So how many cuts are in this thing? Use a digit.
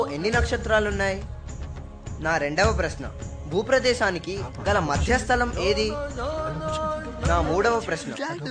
0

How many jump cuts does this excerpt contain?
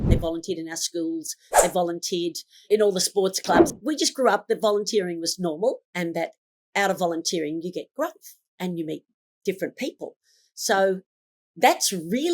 1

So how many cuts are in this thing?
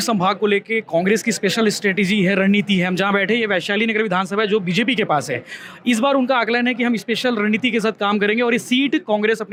0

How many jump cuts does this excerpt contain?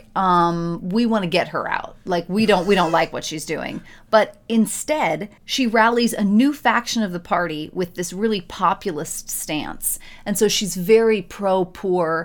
0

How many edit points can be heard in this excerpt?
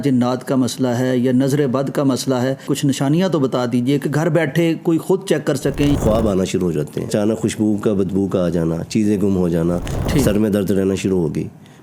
4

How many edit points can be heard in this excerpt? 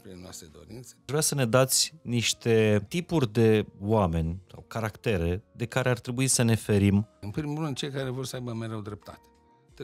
3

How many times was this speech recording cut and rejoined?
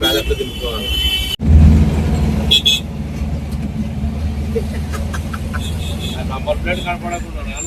1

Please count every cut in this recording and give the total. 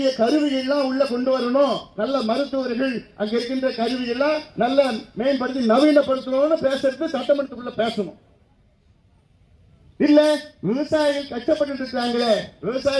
0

